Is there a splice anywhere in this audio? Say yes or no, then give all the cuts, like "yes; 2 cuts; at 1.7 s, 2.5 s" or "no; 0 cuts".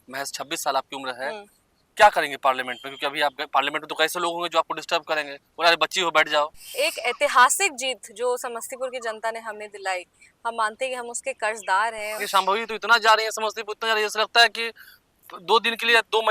yes; 2 cuts; at 6.7 s, 12.2 s